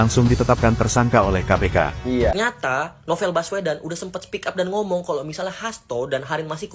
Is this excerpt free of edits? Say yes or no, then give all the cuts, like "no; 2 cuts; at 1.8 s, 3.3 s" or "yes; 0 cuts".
no; 1 cut; at 2.1 s